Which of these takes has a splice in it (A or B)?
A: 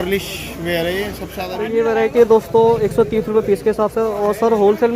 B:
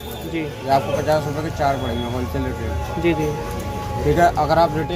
A